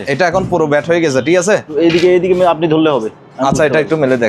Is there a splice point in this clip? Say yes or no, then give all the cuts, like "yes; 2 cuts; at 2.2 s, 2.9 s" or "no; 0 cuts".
yes; 1 cut; at 1.7 s